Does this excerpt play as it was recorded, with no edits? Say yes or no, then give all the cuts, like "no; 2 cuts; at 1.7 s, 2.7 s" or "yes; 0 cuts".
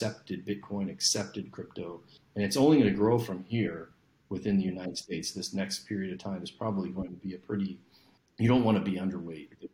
yes; 0 cuts